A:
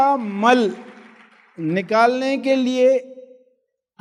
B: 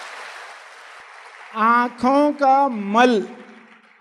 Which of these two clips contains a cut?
B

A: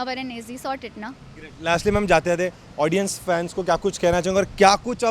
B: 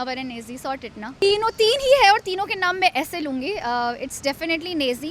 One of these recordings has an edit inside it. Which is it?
B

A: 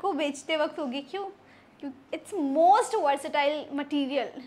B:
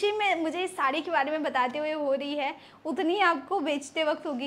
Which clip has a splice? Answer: A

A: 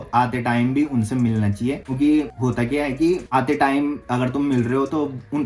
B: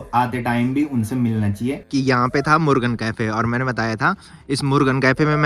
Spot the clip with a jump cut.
B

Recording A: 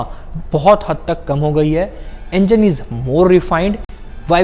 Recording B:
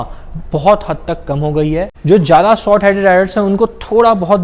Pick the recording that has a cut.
B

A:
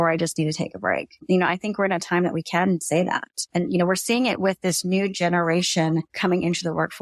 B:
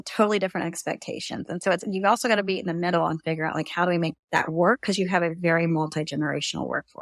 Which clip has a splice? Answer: A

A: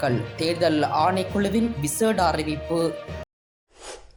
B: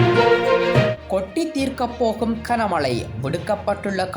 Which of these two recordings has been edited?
B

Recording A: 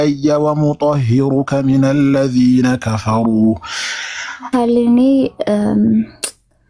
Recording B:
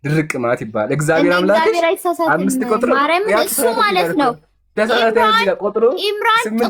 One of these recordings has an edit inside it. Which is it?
A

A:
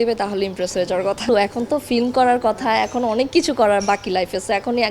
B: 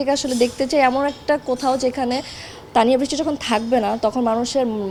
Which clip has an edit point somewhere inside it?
A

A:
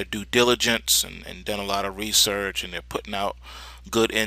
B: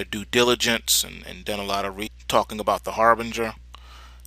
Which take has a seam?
A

